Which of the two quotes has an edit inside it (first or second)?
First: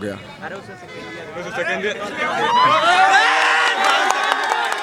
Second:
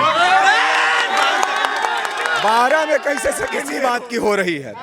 second